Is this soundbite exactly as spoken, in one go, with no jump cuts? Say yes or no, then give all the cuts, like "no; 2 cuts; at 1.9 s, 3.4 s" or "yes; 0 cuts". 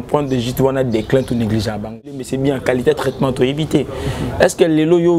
no; 1 cut; at 2.3 s